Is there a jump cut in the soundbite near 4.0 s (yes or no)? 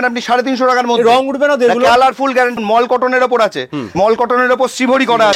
yes